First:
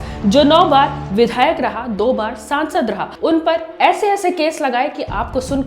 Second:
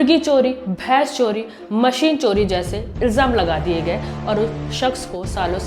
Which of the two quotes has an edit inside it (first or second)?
first